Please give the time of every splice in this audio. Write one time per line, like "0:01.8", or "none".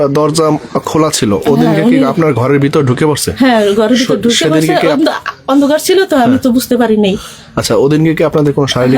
none